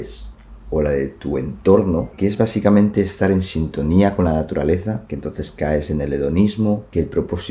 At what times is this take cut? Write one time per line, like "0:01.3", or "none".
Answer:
0:02.1
0:05.0